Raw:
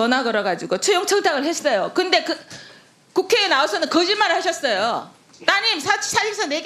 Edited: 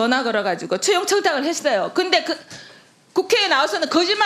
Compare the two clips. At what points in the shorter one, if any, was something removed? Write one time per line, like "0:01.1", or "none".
none